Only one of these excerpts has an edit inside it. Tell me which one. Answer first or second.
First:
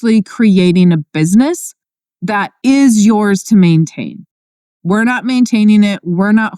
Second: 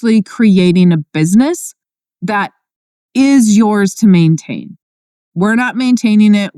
first